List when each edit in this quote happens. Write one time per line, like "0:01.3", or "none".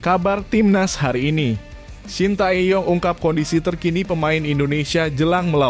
none